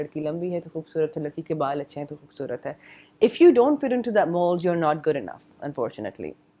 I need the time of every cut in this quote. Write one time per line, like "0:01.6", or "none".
none

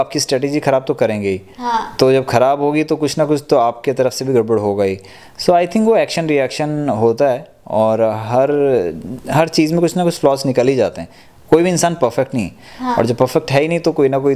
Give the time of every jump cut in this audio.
none

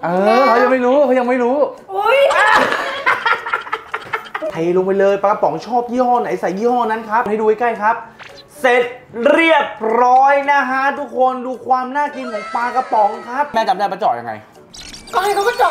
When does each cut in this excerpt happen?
0:04.5
0:07.3
0:13.5

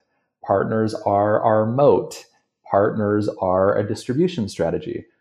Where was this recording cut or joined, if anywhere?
none

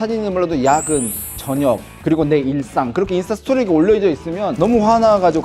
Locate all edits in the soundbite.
0:04.5

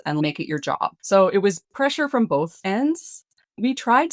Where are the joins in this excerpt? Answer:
0:01.0
0:02.6

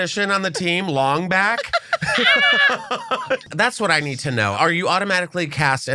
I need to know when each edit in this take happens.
0:03.5
0:04.5

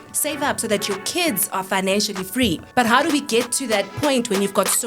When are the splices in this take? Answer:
0:02.6
0:03.9

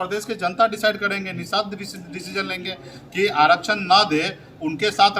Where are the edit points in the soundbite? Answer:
none

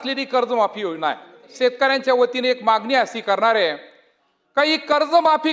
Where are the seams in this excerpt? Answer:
0:01.5

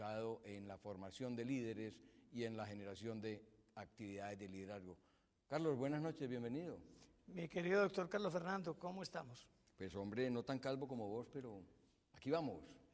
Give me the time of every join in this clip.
none

